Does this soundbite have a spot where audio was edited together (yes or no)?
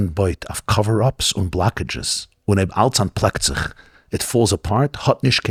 no